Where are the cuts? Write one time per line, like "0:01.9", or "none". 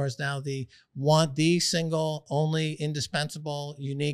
none